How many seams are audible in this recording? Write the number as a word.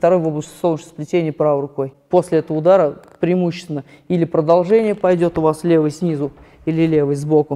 one